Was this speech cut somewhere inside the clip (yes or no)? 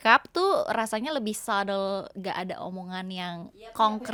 no